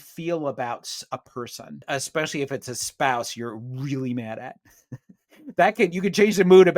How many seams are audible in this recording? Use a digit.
1